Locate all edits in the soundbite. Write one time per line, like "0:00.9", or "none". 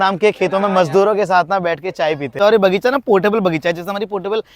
0:02.3